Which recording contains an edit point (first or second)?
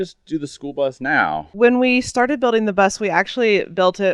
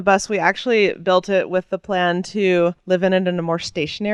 first